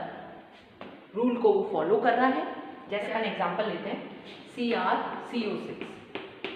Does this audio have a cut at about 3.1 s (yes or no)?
yes